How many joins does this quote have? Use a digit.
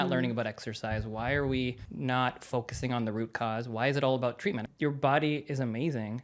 2